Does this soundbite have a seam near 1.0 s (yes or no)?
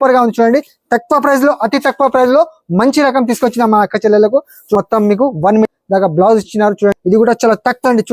no